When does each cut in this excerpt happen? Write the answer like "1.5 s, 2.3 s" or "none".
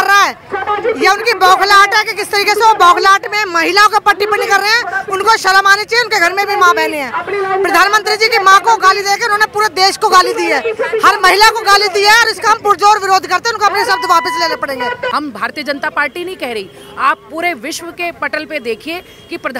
15.1 s